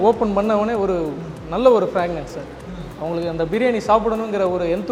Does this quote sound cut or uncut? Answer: uncut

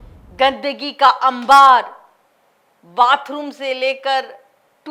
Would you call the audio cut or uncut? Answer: uncut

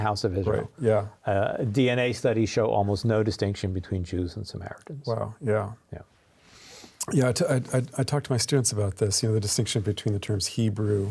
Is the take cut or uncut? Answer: uncut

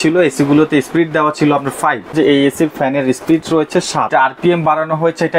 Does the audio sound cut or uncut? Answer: cut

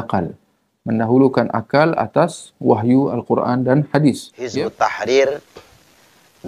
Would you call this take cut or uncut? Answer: cut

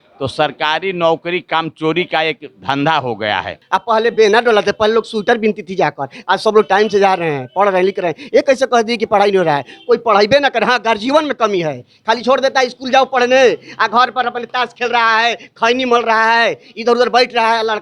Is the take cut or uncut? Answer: cut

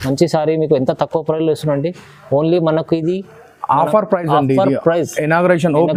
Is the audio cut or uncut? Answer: uncut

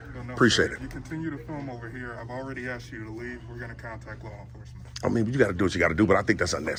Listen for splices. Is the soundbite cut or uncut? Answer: uncut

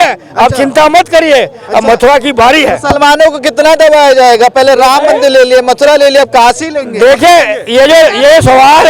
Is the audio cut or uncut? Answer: uncut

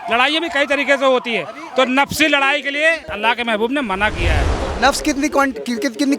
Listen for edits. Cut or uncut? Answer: cut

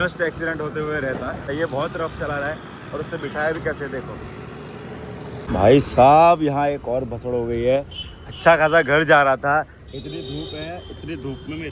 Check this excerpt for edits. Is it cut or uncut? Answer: cut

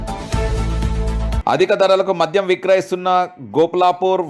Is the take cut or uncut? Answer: cut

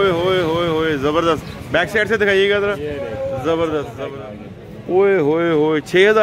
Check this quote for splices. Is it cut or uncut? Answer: cut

